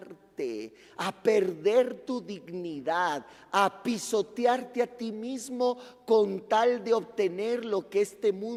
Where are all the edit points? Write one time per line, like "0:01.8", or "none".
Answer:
none